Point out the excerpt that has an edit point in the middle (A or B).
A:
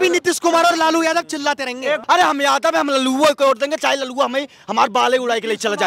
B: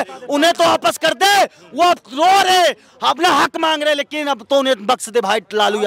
A